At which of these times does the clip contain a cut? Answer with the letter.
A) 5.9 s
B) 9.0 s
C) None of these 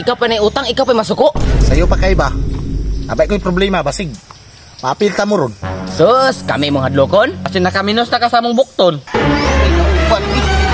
B